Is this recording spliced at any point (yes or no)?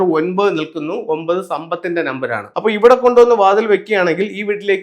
yes